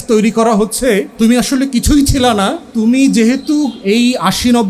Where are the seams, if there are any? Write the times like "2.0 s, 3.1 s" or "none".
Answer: 1.1 s, 2.6 s

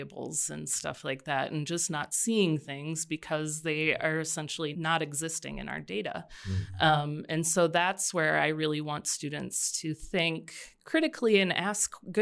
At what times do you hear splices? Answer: 4.7 s

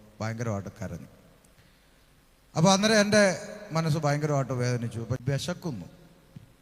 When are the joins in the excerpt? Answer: 5.2 s

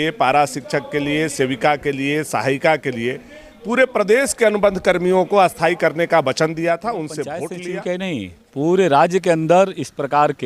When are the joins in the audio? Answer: 7.5 s

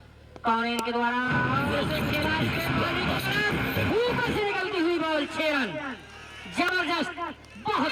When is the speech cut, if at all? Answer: none

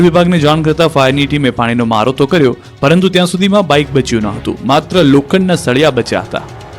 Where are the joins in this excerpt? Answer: 1.3 s

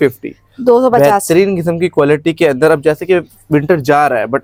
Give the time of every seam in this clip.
none

